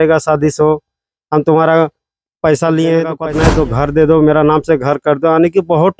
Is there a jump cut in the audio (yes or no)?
yes